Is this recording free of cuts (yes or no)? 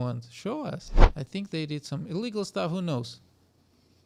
no